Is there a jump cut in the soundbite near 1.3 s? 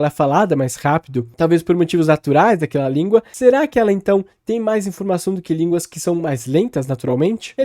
no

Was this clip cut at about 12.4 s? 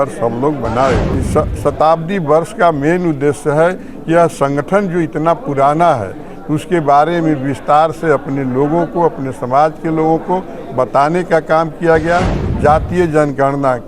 yes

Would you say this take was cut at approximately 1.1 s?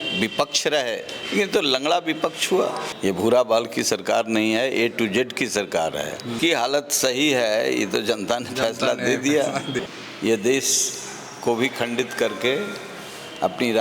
yes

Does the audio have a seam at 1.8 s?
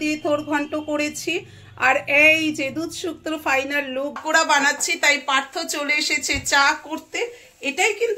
no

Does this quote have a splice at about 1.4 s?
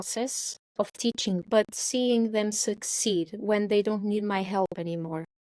yes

